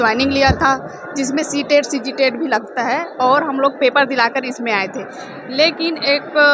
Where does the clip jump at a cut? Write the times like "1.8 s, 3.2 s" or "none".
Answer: none